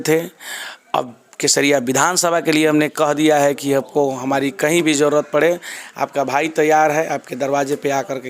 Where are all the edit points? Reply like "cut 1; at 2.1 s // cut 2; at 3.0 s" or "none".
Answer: none